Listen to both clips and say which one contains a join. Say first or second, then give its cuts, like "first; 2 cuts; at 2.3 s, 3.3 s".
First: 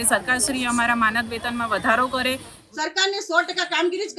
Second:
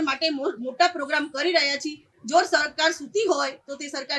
first; 1 cut; at 2.5 s